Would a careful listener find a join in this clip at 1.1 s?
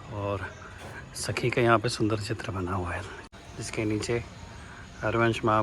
no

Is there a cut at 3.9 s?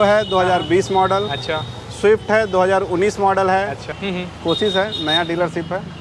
yes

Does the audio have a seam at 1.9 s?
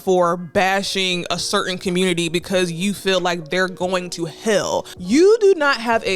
no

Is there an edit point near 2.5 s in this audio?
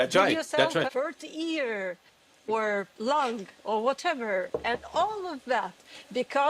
yes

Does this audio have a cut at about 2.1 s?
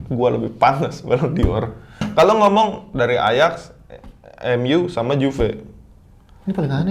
yes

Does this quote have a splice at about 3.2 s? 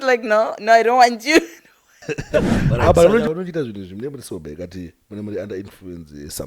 yes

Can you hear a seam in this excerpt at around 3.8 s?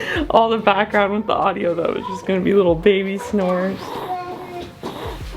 yes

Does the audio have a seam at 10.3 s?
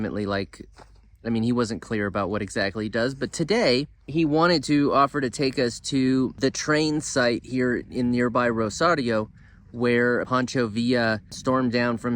yes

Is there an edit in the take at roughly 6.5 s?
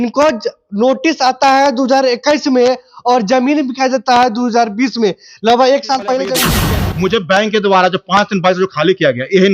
yes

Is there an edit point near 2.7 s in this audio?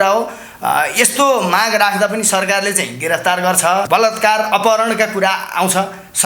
no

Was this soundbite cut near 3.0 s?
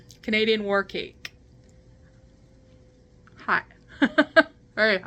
no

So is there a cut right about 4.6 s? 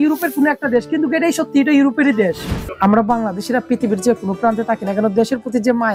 no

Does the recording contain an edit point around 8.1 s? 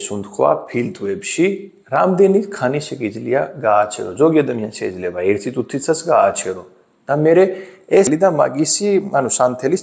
yes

